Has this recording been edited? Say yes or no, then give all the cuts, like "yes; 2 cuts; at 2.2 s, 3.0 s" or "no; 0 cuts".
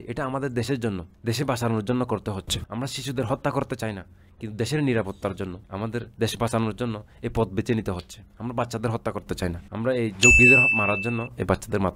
no; 0 cuts